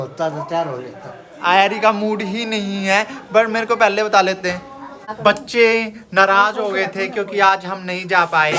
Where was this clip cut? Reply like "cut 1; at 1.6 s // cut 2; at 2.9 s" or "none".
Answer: cut 1; at 5.1 s